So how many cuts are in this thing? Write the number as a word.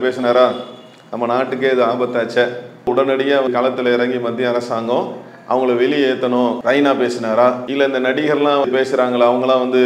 four